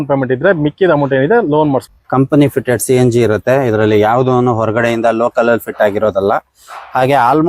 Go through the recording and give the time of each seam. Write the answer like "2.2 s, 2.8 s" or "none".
1.9 s